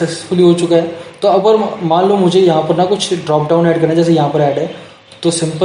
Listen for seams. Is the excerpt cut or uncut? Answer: uncut